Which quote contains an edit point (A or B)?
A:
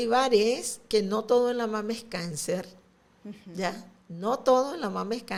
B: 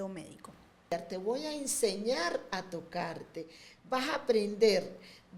B